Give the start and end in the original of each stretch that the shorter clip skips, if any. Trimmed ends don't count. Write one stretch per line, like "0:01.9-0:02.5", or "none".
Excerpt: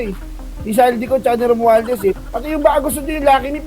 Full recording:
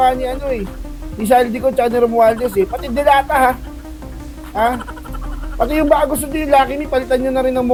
0:02.8-0:05.5